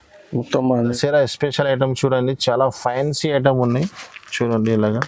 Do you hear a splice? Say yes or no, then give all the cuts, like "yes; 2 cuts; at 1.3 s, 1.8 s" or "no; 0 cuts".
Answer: yes; 1 cut; at 1.0 s